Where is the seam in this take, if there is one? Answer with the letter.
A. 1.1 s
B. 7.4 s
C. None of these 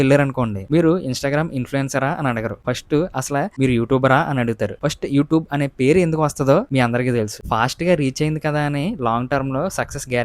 B